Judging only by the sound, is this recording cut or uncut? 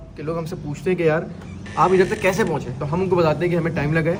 uncut